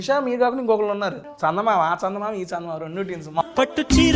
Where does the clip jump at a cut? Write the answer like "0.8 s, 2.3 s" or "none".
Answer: 1.2 s, 3.4 s